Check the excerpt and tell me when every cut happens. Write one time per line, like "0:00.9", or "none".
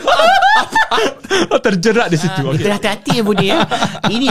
0:02.4